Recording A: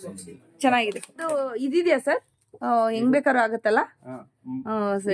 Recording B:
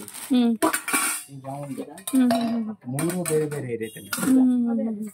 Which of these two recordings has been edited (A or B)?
A